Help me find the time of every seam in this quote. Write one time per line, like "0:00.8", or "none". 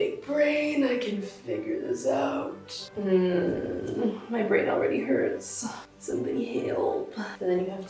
none